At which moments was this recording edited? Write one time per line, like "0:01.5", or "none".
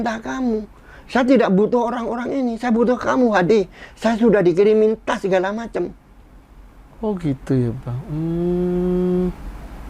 none